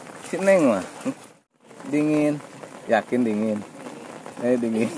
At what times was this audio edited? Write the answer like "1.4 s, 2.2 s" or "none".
1.7 s